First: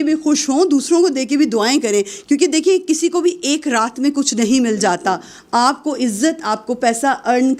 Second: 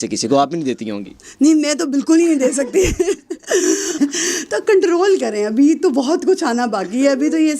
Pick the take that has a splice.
second; 1 cut; at 4.0 s

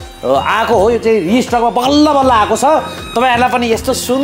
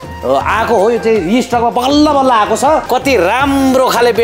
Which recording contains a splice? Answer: second; 1 cut; at 2.9 s

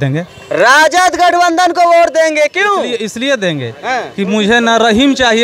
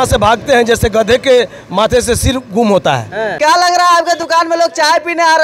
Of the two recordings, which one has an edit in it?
second; 1 cut; at 3.3 s

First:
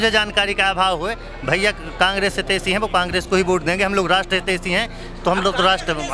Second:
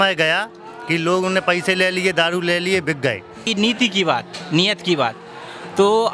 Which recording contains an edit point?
second; 1 cut; at 3.4 s

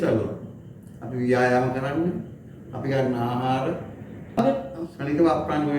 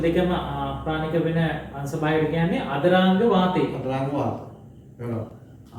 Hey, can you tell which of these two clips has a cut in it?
first; 1 cut; at 4.4 s

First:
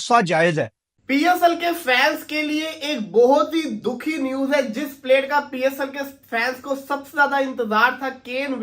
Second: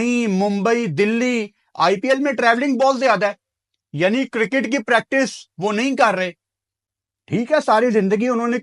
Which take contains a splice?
first; 1 cut; at 1.0 s

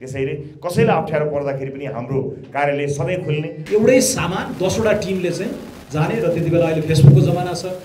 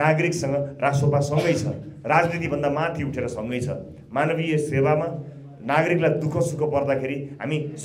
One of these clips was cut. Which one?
first; 1 cut; at 3.5 s

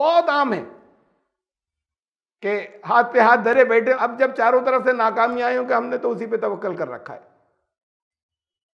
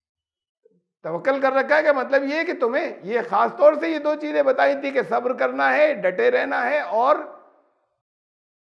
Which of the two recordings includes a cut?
first; 1 cut; at 4.0 s

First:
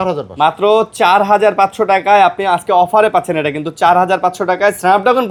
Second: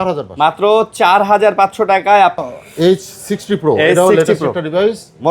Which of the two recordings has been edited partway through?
second; 1 cut; at 2.4 s

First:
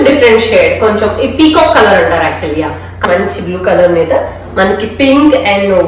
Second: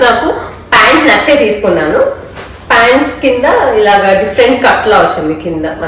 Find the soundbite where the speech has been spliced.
first; 1 cut; at 3.0 s

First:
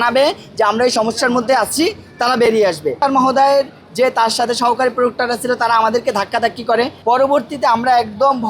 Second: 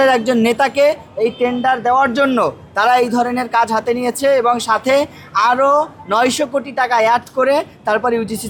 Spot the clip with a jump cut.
first; 2 cuts; at 3.0 s, 7.0 s

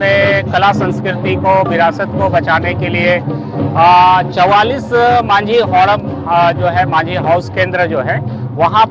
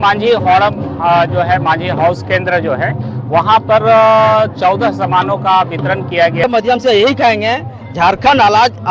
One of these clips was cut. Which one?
second; 1 cut; at 6.4 s

